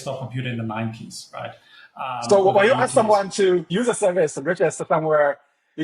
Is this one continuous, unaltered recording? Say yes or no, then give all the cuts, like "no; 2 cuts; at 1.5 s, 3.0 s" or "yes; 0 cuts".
yes; 0 cuts